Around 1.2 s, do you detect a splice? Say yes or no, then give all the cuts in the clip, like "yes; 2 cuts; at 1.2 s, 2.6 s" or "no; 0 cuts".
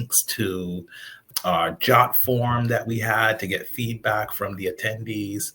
yes; 1 cut; at 1.2 s